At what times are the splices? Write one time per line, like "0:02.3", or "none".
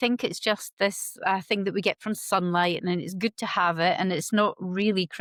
none